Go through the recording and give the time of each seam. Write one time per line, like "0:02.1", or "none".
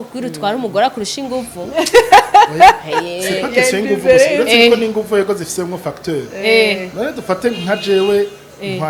none